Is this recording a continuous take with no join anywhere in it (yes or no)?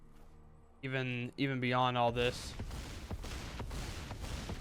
yes